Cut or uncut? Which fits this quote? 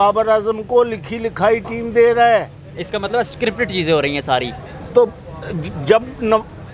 uncut